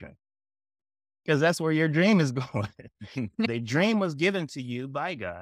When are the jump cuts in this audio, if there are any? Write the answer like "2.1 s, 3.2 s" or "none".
3.5 s